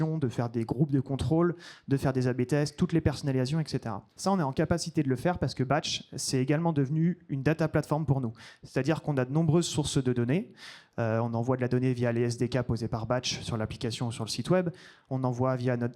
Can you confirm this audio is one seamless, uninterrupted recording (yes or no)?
yes